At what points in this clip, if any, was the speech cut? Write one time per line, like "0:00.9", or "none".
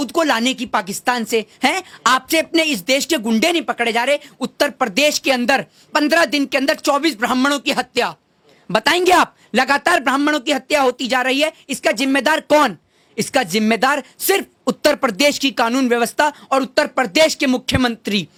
none